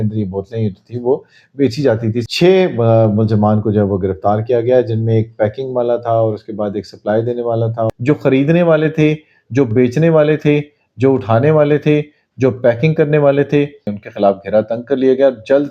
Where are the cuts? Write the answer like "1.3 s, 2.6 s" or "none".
2.2 s, 7.9 s, 13.9 s